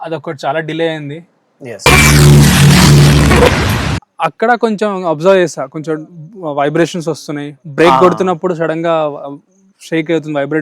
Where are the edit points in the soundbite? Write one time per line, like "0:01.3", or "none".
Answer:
0:04.0